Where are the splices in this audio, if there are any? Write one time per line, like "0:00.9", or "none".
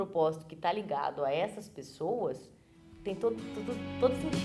none